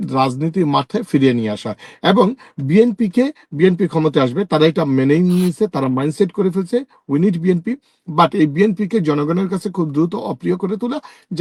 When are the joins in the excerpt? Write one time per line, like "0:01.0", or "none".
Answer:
none